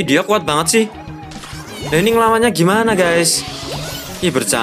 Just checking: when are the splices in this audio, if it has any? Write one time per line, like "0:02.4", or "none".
none